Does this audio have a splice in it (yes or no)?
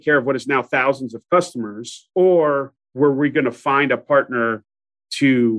no